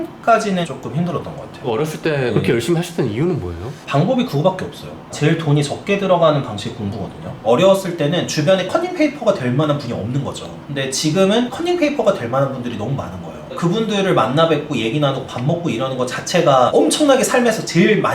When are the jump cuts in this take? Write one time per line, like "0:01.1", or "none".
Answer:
0:01.6
0:07.3
0:11.5